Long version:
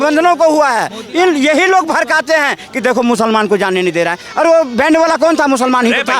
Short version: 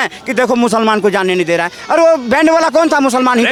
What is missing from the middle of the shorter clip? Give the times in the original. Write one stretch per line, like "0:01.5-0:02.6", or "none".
none